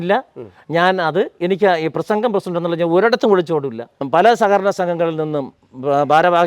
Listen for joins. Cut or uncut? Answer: cut